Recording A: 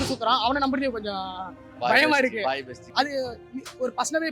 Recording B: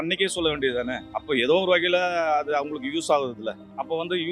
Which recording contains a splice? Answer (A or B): B